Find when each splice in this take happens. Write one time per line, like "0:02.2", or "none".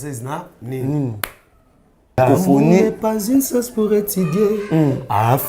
0:02.2